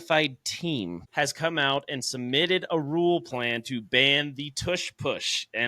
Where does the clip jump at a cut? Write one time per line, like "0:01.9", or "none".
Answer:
0:01.0